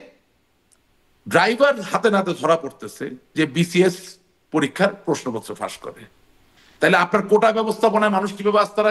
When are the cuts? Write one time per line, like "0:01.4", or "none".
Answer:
none

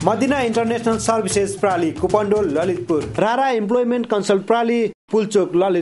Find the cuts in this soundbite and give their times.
0:03.1

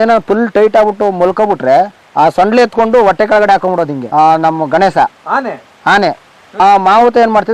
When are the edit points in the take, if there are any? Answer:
0:02.0
0:04.0
0:06.4

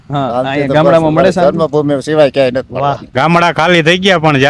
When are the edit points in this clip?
0:03.0

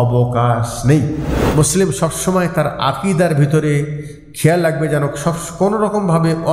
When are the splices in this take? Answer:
0:01.3

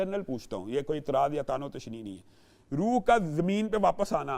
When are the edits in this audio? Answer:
none

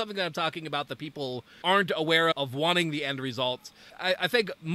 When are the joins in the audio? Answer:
0:01.5
0:02.3

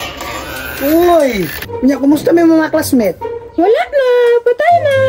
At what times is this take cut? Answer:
0:01.6

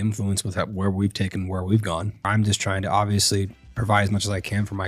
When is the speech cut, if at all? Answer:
0:02.3

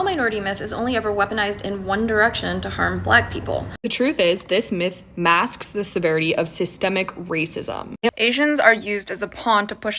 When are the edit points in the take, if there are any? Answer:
0:03.8
0:08.1

